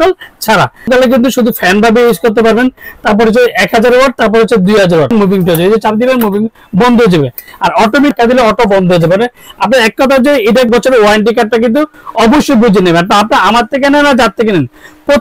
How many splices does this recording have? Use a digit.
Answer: 4